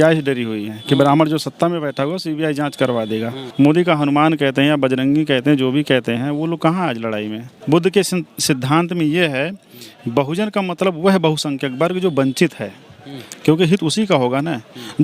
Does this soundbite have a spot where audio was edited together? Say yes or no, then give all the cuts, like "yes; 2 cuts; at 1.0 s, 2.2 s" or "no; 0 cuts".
yes; 2 cuts; at 3.4 s, 7.5 s